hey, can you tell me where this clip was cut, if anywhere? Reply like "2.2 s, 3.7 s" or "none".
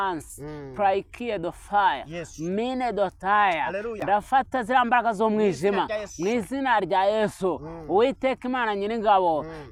none